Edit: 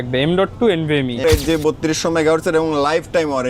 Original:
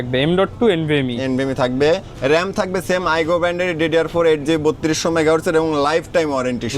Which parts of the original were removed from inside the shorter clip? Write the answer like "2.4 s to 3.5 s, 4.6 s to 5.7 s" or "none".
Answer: 1.2 s to 4.2 s